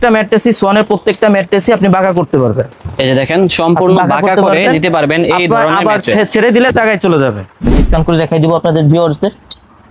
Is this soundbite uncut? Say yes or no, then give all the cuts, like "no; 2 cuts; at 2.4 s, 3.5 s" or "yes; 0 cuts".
no; 1 cut; at 7.7 s